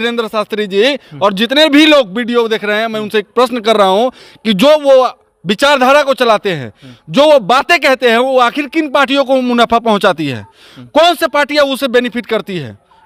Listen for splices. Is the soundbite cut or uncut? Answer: uncut